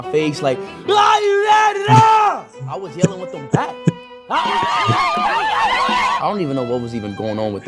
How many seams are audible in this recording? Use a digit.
0